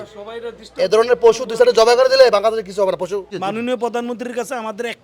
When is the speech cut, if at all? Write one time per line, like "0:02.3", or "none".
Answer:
0:03.3